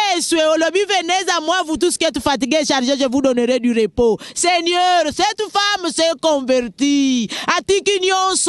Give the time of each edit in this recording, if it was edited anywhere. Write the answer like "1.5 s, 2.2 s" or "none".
none